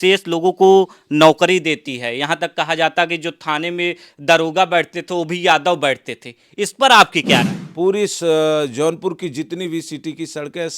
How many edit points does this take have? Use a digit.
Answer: 1